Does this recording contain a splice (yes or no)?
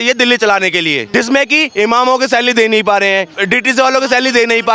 yes